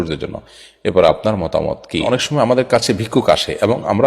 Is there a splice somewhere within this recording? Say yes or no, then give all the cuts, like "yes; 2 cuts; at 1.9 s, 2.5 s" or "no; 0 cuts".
yes; 1 cut; at 2.0 s